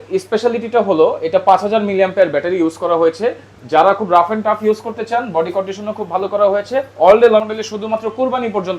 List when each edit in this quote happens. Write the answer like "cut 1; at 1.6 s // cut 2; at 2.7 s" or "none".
cut 1; at 7.4 s